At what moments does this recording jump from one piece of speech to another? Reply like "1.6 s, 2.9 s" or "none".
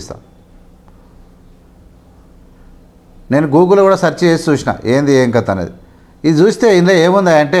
none